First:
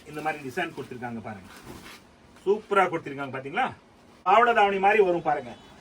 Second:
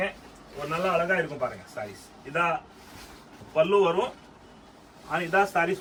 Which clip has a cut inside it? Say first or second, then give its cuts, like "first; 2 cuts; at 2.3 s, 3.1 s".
first; 1 cut; at 4.2 s